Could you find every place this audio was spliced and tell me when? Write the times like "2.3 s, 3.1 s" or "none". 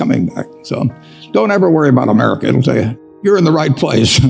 3.2 s